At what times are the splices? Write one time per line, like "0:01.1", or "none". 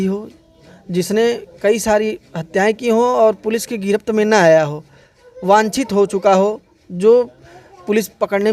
none